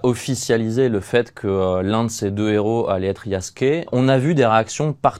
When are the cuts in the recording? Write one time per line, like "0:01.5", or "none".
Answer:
0:03.9